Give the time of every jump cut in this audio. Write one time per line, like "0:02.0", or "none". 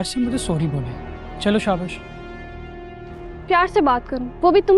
none